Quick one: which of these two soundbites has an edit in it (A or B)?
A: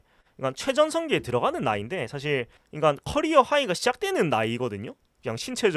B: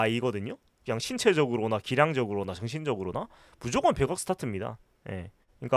A